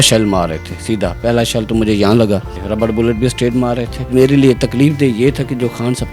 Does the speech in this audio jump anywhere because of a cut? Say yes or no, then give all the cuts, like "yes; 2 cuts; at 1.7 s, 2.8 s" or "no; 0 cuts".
yes; 2 cuts; at 2.6 s, 4.1 s